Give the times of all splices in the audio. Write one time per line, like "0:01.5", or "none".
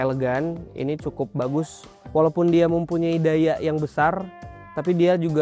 0:02.1